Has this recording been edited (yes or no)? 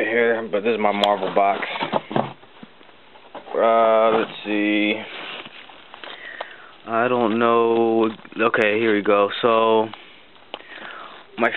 yes